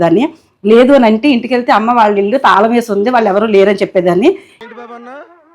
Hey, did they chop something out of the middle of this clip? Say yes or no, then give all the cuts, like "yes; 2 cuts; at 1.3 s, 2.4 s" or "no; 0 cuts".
yes; 1 cut; at 4.6 s